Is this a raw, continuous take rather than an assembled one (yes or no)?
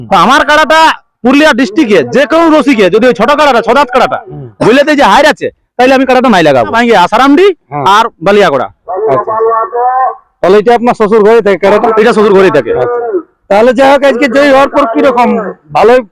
no